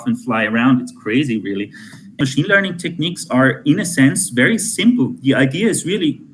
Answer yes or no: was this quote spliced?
yes